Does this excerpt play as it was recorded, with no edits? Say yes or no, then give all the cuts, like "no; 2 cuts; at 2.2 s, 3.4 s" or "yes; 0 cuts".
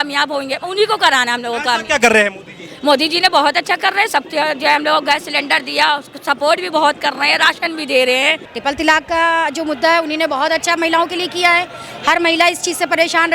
no; 1 cut; at 8.5 s